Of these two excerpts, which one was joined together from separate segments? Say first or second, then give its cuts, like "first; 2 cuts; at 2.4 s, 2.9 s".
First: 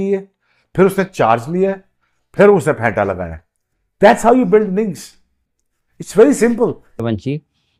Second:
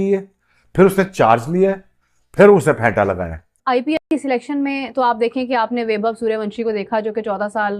second; 1 cut; at 3.9 s